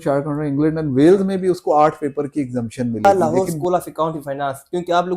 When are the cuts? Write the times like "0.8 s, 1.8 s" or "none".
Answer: 3.0 s